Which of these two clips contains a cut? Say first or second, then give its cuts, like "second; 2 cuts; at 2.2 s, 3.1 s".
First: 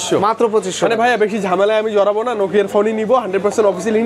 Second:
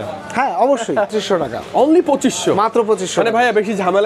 second; 1 cut; at 1.1 s